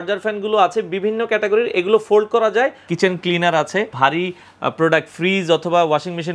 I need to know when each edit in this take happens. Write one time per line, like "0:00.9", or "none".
0:02.9
0:03.9